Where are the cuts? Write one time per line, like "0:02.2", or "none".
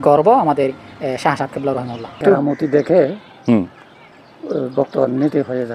0:02.2